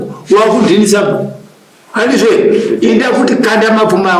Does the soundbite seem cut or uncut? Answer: uncut